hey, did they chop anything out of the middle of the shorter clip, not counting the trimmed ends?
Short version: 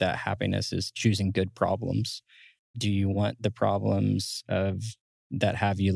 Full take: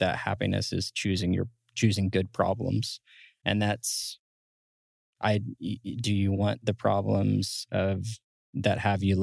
yes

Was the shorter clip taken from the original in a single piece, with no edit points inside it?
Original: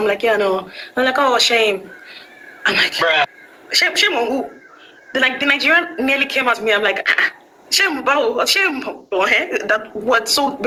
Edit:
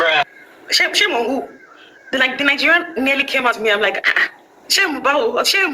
yes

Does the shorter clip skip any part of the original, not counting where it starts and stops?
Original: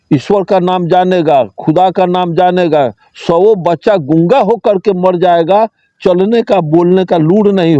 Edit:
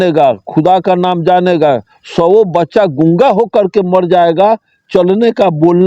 no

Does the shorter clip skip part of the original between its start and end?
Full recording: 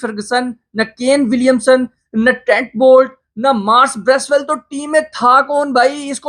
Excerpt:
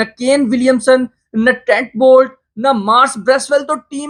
no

